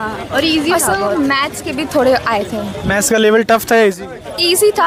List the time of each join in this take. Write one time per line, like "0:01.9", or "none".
none